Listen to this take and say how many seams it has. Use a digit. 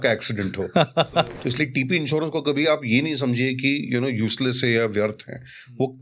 1